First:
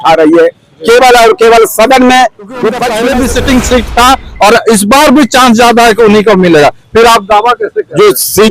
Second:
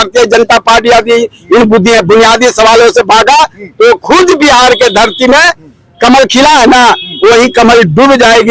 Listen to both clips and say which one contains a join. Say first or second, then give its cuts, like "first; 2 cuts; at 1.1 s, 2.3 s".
first; 1 cut; at 2.9 s